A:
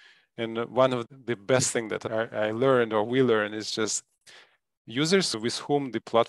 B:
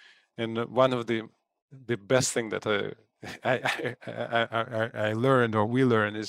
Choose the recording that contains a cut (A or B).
A